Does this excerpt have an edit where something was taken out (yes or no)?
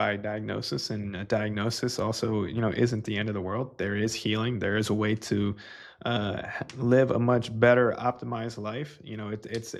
no